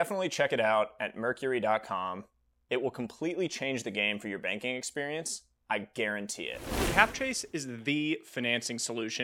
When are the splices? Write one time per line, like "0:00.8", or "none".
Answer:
0:06.9